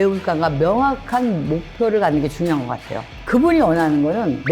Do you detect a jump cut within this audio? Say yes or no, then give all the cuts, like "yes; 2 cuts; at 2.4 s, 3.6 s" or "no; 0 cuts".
yes; 1 cut; at 3.1 s